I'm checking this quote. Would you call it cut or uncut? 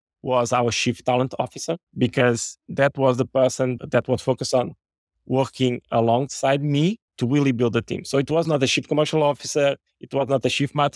cut